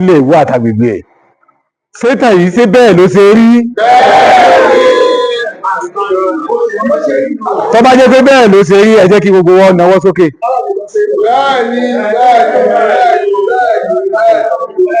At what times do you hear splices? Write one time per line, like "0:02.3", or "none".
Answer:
none